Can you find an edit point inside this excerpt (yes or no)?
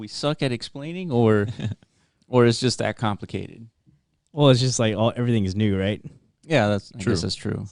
no